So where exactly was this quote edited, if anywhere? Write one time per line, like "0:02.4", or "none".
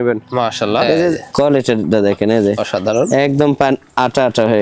0:01.2